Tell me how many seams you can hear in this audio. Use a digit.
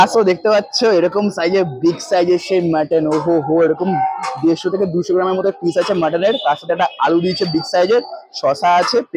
0